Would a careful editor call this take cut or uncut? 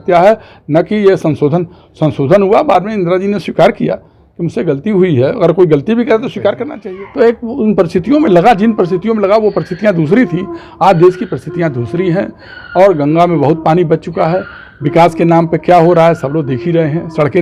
cut